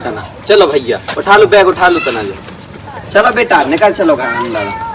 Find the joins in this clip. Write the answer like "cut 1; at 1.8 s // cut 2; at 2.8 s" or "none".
none